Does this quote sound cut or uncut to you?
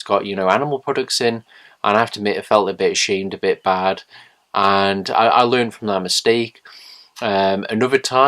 cut